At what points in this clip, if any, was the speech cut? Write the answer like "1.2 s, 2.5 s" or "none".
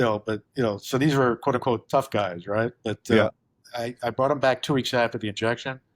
3.2 s